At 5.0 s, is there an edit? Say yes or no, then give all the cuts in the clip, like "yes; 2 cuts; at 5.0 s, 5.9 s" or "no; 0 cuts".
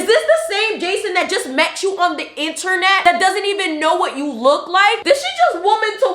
yes; 1 cut; at 5.0 s